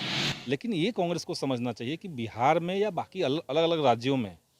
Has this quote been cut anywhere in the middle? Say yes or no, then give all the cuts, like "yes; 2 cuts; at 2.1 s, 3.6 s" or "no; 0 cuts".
no; 0 cuts